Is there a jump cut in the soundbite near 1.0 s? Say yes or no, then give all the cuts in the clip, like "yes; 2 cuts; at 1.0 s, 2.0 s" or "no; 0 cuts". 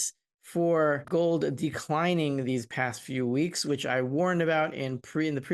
yes; 1 cut; at 1.0 s